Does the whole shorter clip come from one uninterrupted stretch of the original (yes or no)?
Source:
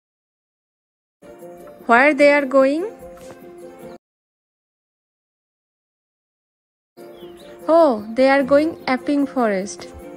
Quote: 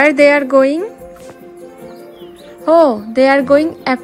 no